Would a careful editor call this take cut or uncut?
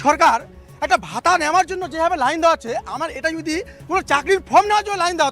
uncut